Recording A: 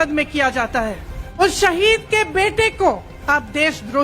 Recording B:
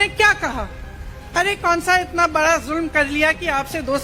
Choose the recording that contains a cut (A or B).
A